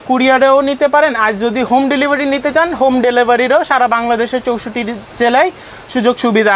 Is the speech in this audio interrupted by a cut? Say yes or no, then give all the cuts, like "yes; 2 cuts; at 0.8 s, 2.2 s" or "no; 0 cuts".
no; 0 cuts